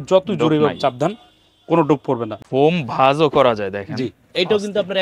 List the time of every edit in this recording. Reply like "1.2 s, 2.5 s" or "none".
2.4 s